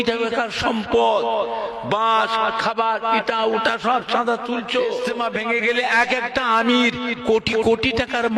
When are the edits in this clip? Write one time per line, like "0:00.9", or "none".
0:05.1